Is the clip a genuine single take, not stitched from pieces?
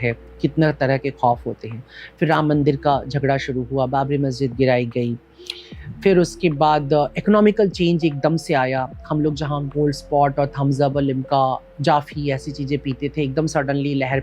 yes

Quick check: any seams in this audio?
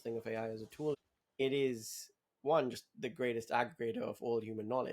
yes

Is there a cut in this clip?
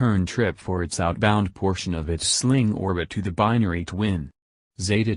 no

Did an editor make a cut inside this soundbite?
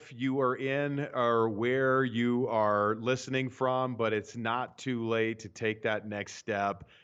no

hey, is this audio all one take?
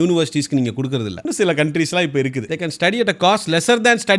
no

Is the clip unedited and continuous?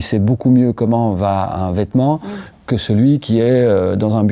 yes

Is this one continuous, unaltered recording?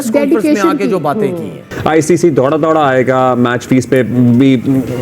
no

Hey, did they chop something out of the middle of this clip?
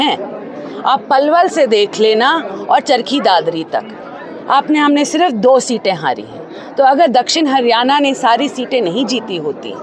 no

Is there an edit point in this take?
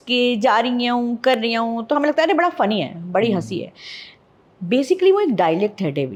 no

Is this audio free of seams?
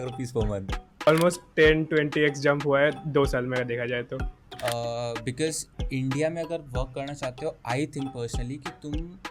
no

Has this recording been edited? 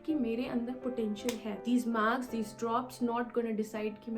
yes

